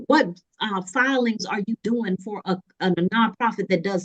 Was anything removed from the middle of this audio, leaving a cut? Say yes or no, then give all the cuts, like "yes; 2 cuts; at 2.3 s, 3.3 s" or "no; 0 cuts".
no; 0 cuts